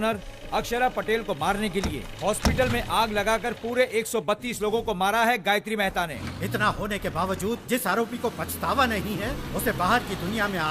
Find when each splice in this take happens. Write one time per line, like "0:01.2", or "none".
0:06.1